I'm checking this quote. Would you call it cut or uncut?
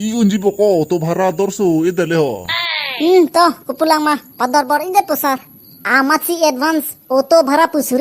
cut